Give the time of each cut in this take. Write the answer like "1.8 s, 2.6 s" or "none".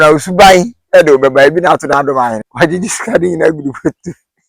2.4 s